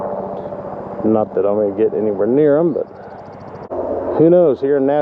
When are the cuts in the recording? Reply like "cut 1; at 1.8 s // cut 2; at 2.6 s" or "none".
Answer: cut 1; at 3.7 s